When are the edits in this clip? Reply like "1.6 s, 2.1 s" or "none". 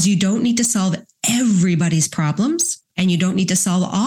2.8 s